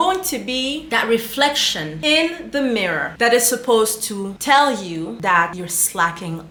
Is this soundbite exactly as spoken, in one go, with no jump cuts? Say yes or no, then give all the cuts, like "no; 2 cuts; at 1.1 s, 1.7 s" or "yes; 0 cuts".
yes; 0 cuts